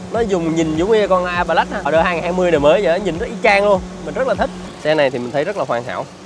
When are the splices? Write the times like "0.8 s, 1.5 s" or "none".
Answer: 1.9 s, 4.7 s